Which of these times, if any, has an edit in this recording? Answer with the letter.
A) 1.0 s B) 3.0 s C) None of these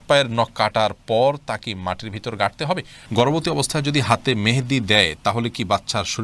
B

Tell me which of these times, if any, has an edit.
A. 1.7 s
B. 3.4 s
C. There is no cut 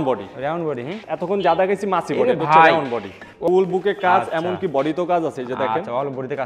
B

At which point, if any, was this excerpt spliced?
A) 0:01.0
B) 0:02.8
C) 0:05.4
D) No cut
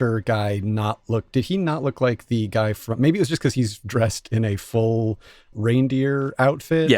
C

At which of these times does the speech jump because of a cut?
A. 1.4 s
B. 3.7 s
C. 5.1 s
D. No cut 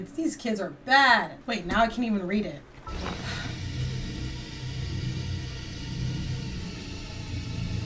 A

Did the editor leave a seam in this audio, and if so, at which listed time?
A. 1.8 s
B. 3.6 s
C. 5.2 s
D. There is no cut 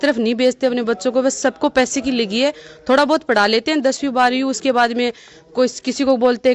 D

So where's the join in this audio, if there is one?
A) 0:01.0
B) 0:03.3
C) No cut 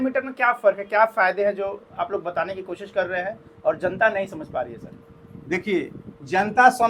C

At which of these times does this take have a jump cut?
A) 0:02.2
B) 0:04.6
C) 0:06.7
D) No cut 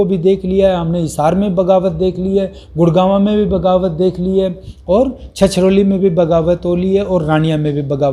D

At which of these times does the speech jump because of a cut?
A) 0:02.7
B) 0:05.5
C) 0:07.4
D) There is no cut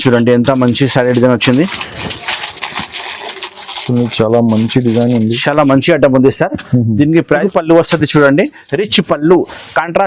C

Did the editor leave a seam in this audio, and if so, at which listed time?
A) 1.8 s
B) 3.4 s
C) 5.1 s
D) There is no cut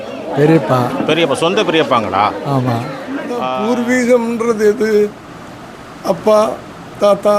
B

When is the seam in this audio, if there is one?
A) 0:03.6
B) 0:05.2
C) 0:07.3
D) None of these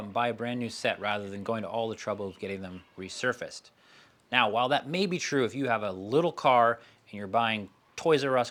D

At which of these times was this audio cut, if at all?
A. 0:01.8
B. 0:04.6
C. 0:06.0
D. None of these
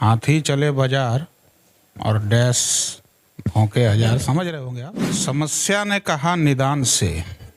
B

